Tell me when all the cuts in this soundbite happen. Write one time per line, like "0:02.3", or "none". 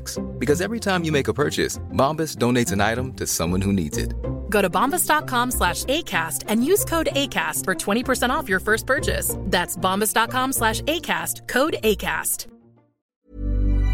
0:13.0

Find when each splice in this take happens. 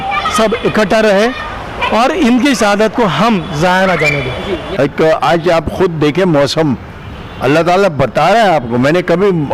0:04.7

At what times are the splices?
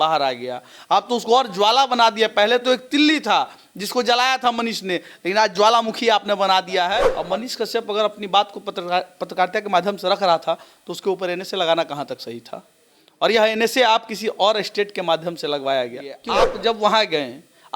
0:07.1
0:16.3

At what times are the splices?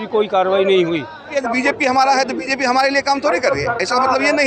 0:01.3

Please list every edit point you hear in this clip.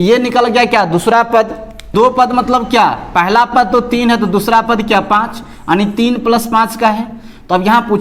0:01.9

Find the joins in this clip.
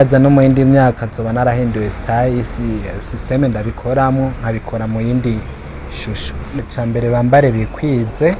0:06.6

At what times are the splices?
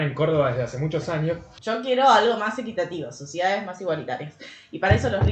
0:01.5

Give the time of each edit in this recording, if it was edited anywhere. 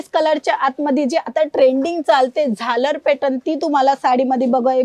none

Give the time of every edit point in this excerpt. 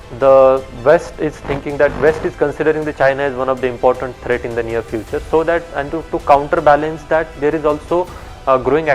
none

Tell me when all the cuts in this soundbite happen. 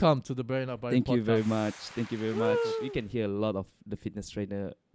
0:02.9

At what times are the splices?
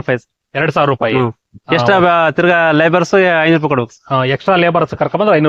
none

